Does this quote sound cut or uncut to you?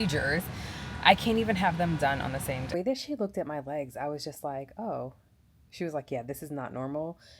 cut